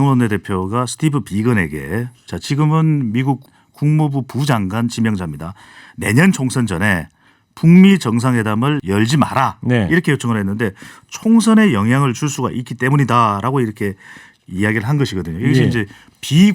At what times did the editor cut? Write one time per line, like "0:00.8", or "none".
0:03.4
0:08.8